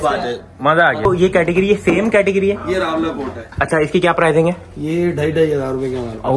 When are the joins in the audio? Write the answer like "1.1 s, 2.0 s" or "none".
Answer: 1.1 s